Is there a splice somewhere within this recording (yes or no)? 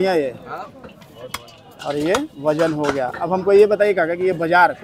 no